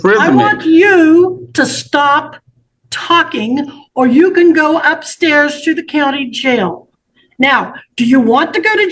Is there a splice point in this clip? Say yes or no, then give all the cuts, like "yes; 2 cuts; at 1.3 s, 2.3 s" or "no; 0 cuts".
no; 0 cuts